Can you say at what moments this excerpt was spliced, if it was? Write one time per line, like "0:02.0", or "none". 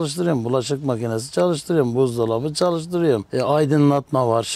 none